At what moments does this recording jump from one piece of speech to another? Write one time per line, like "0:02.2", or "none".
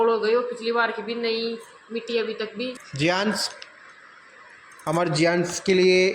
0:02.8